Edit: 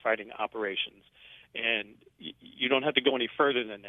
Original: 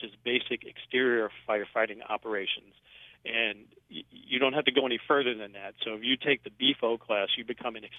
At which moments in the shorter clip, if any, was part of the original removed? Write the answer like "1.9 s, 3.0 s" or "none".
none